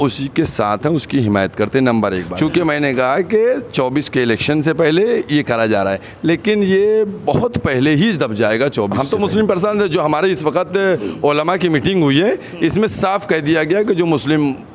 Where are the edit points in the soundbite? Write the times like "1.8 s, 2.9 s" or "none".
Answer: 2.3 s, 9.0 s